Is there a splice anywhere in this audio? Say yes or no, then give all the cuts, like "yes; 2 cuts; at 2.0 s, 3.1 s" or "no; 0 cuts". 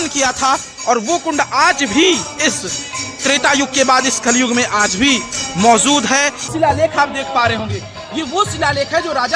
yes; 1 cut; at 6.5 s